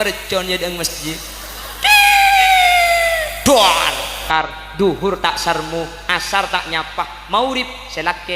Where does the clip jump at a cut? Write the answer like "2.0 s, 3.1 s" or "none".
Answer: 4.2 s